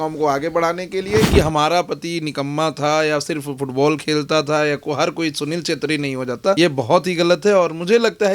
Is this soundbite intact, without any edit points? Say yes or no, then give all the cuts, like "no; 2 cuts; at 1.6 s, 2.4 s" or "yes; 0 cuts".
no; 2 cuts; at 1.3 s, 6.6 s